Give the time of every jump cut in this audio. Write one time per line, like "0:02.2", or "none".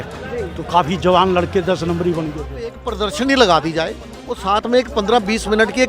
0:02.9
0:04.3